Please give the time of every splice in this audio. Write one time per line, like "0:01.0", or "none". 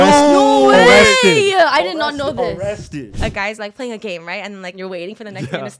0:03.0
0:04.8